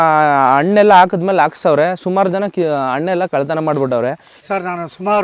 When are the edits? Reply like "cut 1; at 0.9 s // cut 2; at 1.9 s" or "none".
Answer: cut 1; at 4.3 s